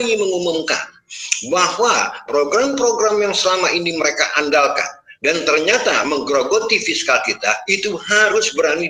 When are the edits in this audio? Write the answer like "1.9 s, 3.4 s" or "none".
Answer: none